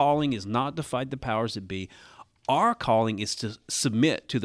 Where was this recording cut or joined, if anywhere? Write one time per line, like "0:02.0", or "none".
none